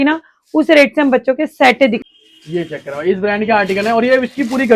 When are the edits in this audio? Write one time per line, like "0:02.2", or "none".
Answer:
0:02.1